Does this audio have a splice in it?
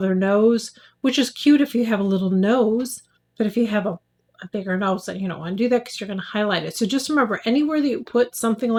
no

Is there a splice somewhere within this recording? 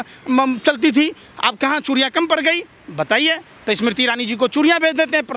no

